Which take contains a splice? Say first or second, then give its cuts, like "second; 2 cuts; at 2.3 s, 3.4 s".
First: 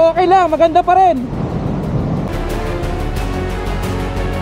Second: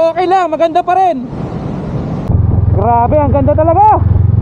second; 1 cut; at 2.3 s